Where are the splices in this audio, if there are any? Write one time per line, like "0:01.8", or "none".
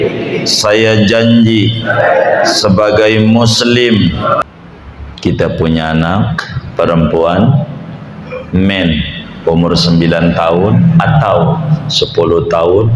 0:04.4